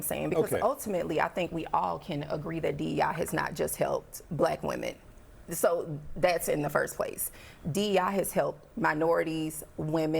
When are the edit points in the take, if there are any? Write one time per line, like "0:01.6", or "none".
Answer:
0:07.9